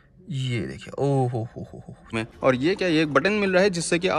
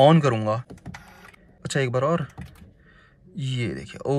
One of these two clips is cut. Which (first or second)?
first